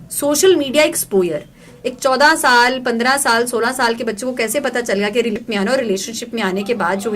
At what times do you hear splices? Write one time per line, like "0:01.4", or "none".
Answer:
0:05.3